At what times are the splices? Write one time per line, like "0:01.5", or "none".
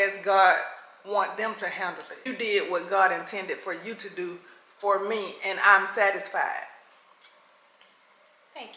0:02.2